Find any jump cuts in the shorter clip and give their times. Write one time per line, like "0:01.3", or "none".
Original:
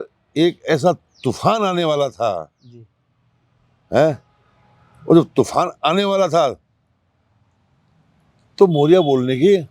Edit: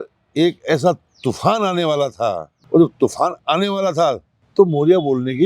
0:02.5
0:04.3